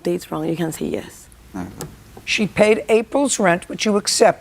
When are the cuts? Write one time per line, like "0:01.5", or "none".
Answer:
0:02.5